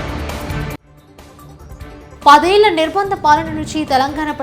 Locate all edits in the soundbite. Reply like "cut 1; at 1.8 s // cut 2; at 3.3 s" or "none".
cut 1; at 1.5 s